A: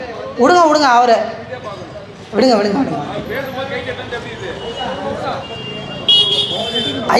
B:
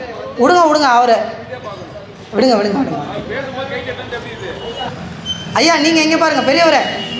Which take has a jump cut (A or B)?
B